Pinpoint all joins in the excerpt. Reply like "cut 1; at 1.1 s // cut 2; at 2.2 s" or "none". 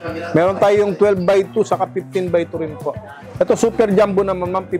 cut 1; at 3.2 s